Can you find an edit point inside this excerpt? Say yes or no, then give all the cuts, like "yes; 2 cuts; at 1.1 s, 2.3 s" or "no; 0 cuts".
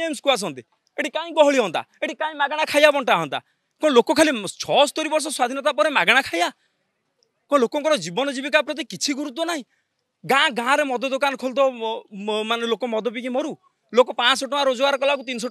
no; 0 cuts